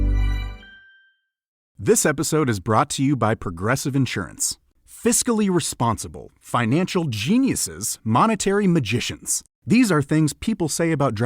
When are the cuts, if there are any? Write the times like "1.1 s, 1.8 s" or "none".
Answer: 1.7 s